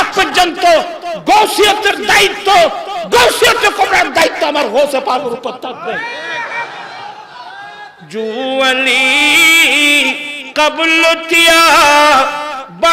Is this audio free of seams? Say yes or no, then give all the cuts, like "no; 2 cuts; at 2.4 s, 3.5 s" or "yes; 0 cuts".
yes; 0 cuts